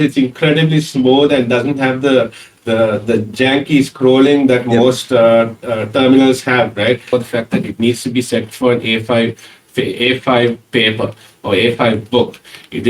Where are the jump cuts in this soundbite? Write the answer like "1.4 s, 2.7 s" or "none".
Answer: 7.1 s